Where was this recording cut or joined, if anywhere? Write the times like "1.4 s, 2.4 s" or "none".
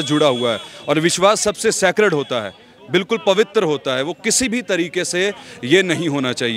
none